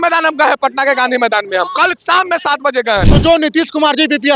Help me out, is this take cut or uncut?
cut